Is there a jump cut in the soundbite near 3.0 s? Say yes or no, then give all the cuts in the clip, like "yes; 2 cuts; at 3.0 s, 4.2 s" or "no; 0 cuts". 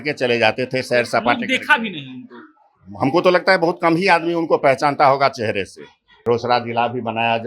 no; 1 cut; at 6.2 s